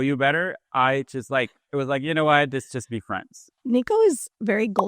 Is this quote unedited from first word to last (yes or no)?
no